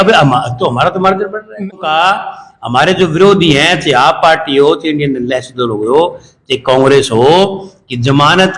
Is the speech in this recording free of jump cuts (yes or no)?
no